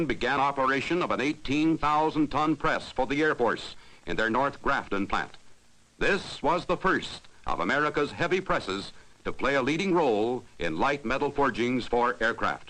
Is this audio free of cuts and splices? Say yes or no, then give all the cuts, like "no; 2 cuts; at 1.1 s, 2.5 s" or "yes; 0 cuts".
no; 1 cut; at 8.6 s